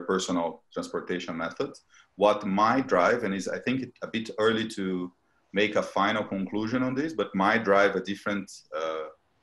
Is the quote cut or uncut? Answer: uncut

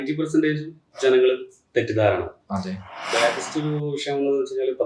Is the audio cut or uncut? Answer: cut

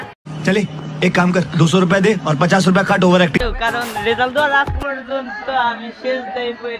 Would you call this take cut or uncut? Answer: cut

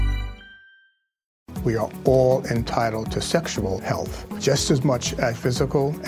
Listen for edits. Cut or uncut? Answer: cut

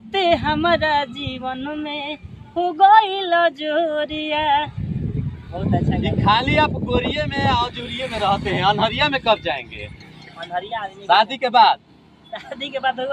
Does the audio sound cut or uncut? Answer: uncut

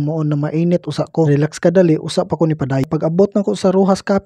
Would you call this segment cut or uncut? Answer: cut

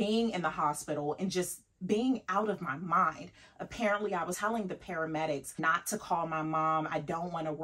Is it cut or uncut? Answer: cut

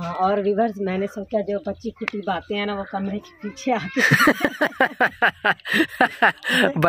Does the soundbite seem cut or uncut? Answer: uncut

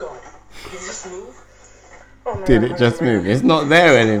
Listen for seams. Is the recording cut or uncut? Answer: uncut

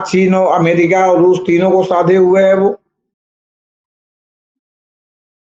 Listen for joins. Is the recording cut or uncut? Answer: uncut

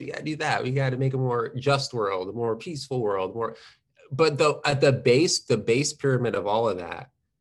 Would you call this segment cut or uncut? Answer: uncut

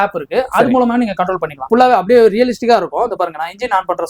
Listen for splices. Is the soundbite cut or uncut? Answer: cut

